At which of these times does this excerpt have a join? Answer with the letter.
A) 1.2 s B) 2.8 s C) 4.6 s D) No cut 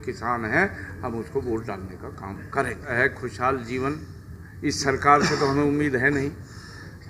B